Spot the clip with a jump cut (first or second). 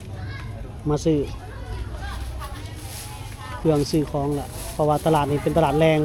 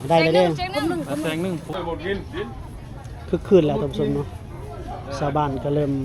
second